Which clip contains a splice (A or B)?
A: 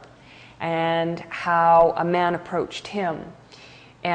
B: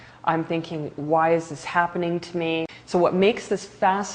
B